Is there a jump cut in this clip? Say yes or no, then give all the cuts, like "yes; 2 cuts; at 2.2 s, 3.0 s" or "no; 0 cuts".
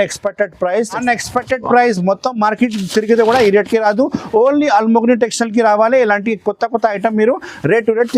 yes; 1 cut; at 1.0 s